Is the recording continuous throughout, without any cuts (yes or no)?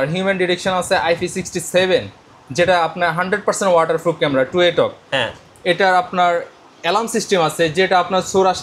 yes